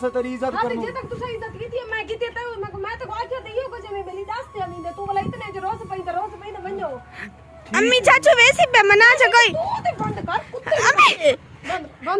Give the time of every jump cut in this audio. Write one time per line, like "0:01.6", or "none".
0:11.3